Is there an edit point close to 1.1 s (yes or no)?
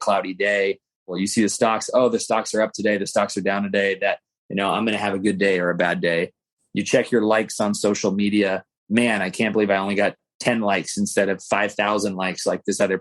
yes